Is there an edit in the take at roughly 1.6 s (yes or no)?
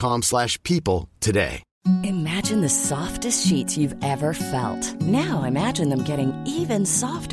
yes